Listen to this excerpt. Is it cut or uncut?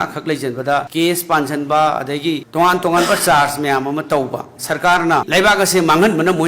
cut